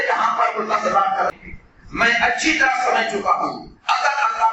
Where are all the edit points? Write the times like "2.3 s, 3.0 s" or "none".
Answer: 1.3 s